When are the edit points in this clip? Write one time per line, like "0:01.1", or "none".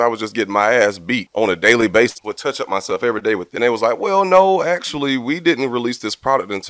0:01.3
0:02.2
0:03.5

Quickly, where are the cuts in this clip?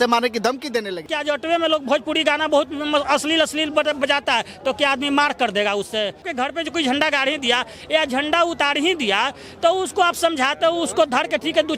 0:01.1
0:06.2

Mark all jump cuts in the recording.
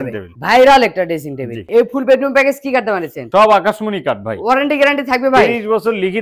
0:01.6

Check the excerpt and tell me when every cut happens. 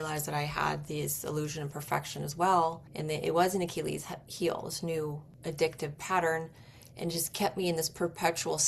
0:02.9
0:05.3

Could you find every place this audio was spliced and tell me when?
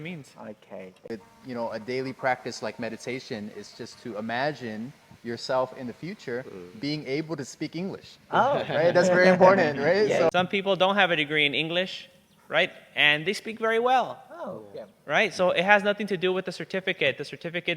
0:01.3
0:10.3

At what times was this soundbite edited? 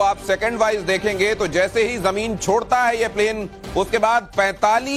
none

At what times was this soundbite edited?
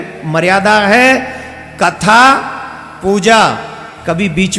none

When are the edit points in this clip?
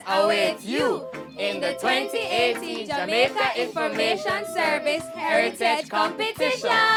none

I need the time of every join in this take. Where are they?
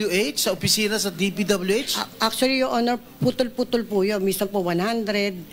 0:02.0

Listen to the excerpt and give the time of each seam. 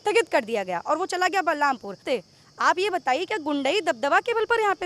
0:02.0

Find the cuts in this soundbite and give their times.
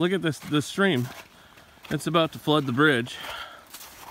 none

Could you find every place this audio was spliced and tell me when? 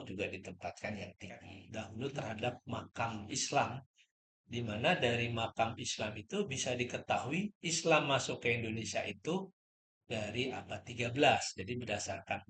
0:01.6

